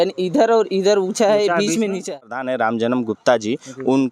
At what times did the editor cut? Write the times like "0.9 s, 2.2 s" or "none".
2.5 s